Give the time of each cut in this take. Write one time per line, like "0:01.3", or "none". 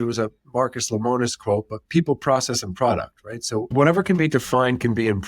0:03.7